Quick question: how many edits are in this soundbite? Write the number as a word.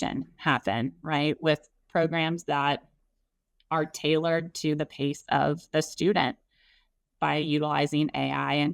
zero